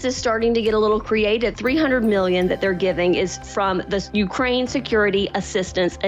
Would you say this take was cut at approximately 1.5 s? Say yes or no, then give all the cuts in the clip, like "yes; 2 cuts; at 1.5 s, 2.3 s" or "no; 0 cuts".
yes; 2 cuts; at 1.5 s, 4.1 s